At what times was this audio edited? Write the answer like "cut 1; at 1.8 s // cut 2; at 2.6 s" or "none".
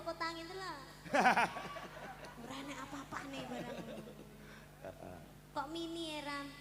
none